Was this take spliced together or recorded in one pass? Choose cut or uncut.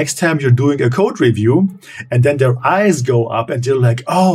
uncut